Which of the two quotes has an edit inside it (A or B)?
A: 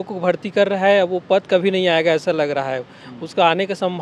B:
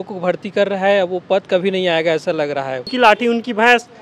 B